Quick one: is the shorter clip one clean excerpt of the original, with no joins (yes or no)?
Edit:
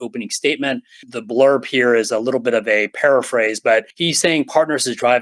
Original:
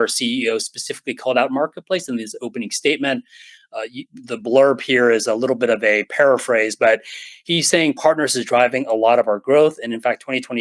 no